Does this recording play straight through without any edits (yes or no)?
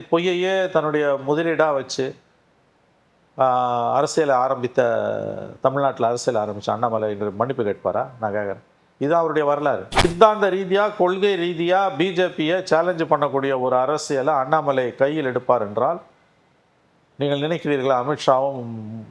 no